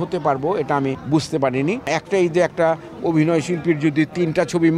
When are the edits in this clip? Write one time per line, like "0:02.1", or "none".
0:01.0
0:01.9